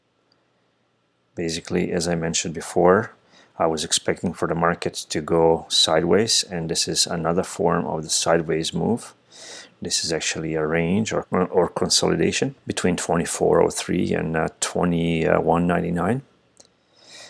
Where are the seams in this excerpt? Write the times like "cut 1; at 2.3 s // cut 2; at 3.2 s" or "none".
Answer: cut 1; at 11.3 s // cut 2; at 12.6 s